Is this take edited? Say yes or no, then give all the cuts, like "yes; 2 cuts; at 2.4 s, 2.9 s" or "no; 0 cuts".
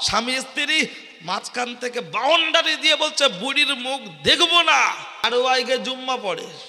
yes; 1 cut; at 5.3 s